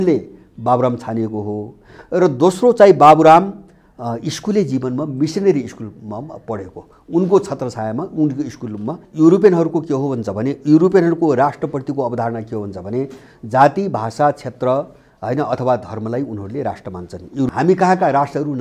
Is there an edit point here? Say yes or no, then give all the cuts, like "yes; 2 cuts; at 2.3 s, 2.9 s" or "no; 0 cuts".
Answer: yes; 2 cuts; at 9.0 s, 17.5 s